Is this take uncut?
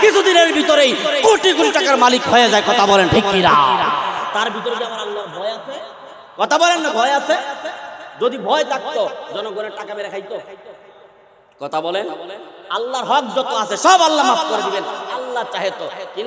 yes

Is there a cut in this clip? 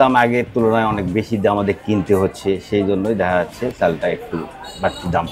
no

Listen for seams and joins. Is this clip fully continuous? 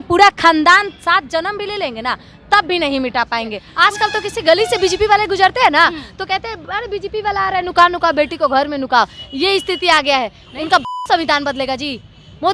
no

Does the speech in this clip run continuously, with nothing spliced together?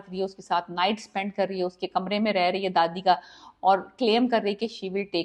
yes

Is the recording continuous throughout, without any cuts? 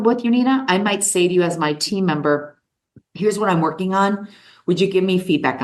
yes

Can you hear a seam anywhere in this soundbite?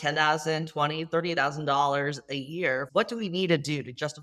yes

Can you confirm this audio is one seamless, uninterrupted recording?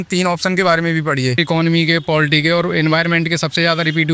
no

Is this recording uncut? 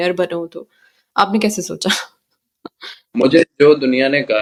yes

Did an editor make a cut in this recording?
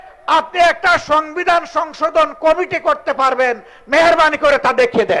no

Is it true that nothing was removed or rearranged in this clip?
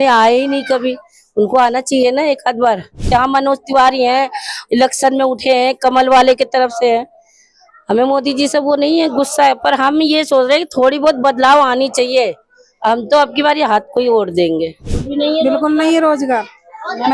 no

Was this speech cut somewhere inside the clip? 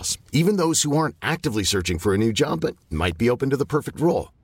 no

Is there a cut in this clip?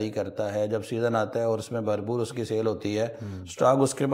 no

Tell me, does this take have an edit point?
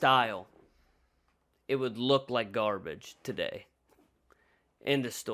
no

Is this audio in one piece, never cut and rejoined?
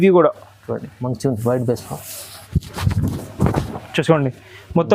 yes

